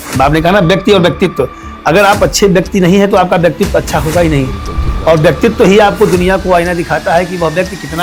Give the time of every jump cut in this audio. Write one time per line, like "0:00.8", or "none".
none

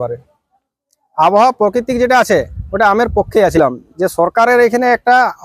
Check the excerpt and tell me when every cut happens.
0:03.6

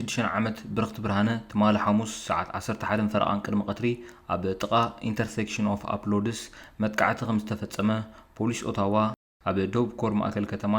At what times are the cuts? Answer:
none

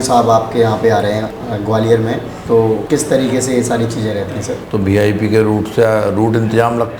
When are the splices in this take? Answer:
0:01.4
0:02.5
0:04.6

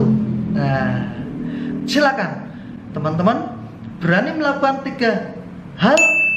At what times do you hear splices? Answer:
none

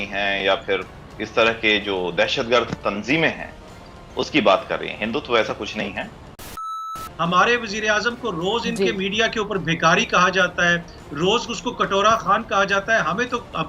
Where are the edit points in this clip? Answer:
0:06.7

